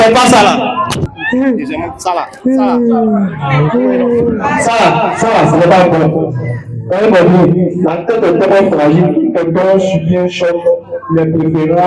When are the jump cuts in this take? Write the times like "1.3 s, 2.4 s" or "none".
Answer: 1.1 s